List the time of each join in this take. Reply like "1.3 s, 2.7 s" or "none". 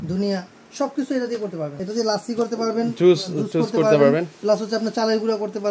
1.7 s